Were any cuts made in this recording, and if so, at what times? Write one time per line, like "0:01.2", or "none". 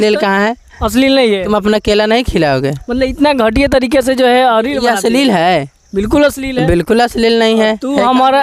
none